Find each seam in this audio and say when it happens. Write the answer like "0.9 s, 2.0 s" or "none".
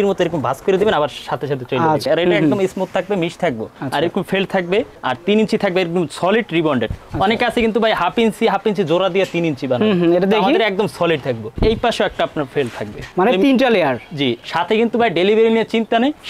2.0 s, 11.5 s, 14.4 s